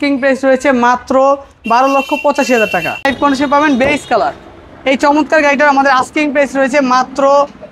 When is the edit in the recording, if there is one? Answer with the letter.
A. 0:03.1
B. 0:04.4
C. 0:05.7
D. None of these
A